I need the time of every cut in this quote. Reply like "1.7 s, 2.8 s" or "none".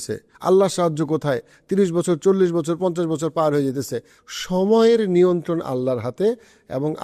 4.1 s